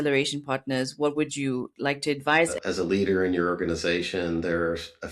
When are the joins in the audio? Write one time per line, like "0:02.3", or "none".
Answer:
0:02.6

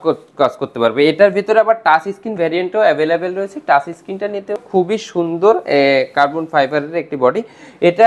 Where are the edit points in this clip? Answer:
0:04.6

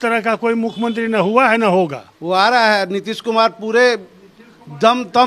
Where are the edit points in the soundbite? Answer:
0:02.1

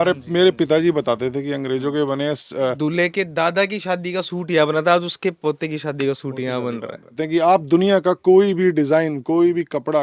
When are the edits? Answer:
0:02.8
0:07.2

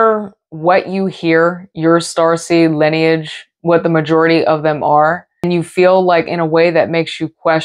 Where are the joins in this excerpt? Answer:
0:05.5

